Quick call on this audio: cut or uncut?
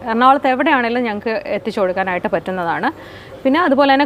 uncut